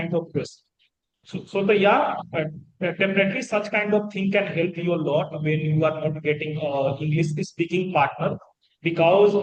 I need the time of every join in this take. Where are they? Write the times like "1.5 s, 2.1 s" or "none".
none